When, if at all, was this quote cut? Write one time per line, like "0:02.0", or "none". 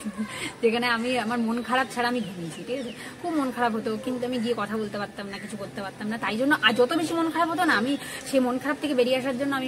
none